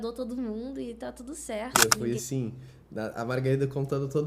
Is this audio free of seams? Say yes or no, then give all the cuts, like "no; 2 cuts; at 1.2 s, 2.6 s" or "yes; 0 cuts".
no; 1 cut; at 1.8 s